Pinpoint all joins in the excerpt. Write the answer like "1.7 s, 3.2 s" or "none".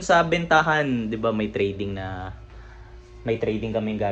none